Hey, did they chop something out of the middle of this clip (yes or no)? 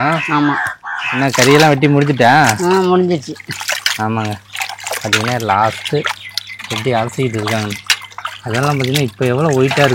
yes